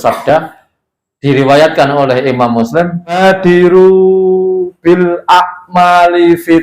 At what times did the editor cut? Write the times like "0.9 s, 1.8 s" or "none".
3.2 s